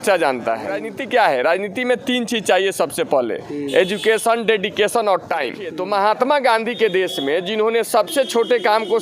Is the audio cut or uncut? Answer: cut